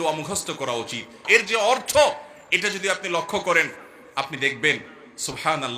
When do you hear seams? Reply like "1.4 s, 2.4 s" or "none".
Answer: 1.2 s